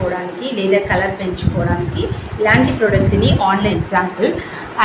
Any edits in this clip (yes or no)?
yes